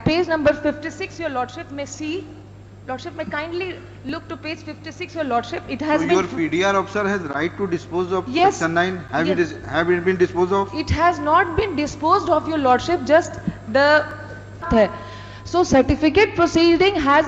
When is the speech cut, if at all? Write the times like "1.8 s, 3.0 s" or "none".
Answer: 14.7 s